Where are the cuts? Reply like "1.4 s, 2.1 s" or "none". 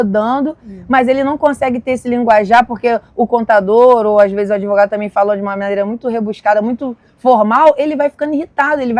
none